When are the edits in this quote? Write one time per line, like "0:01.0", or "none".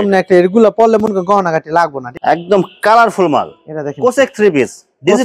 0:02.0